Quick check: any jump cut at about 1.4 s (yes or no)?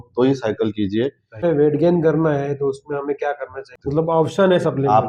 yes